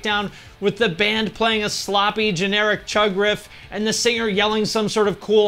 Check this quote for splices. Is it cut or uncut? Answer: uncut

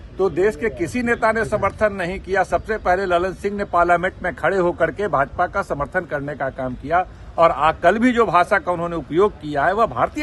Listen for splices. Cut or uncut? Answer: uncut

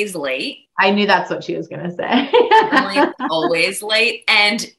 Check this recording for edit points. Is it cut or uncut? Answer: uncut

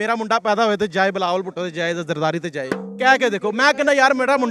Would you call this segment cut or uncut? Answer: uncut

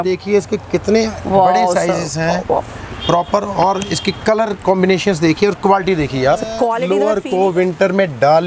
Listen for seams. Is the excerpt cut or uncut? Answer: cut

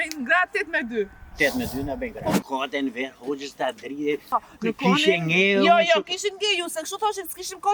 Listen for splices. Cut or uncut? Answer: cut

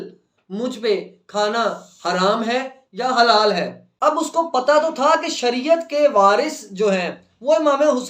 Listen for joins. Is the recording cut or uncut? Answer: cut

